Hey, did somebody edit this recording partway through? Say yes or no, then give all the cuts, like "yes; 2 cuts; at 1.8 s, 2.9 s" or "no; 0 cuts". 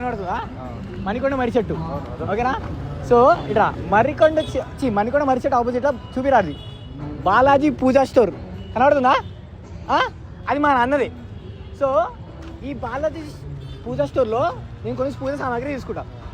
no; 0 cuts